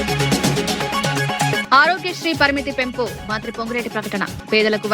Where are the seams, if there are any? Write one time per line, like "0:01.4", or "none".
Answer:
0:01.6